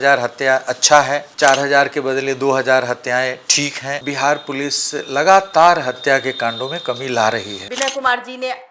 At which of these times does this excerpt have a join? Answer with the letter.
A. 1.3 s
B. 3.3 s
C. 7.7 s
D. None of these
C